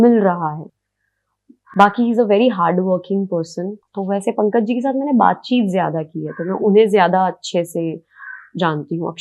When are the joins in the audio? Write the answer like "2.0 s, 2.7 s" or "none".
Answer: 3.8 s